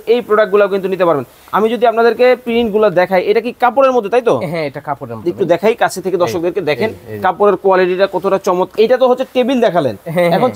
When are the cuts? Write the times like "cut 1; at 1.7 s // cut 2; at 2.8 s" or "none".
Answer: cut 1; at 8.7 s

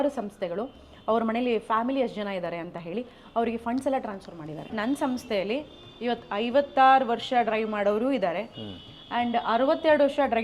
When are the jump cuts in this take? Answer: cut 1; at 4.7 s

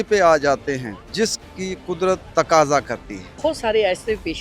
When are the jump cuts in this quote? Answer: cut 1; at 1.0 s // cut 2; at 2.3 s // cut 3; at 3.4 s

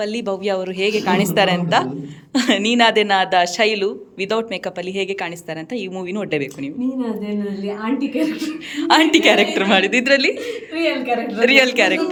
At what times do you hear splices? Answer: none

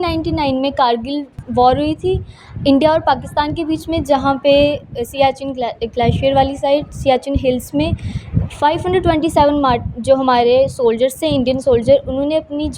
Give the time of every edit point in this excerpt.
none

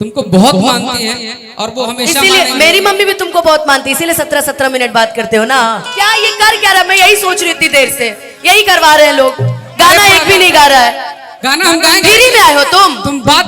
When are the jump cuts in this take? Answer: cut 1; at 5.8 s

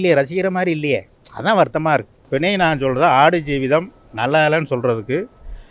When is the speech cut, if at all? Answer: cut 1; at 2.2 s

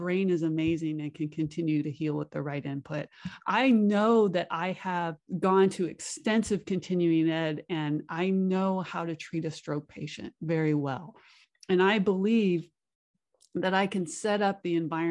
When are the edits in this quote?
cut 1; at 5.2 s

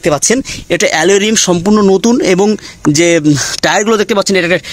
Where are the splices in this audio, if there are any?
none

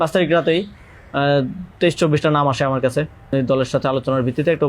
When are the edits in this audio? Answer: cut 1; at 3.3 s

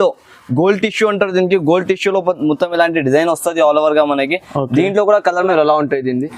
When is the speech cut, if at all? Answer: cut 1; at 5.4 s

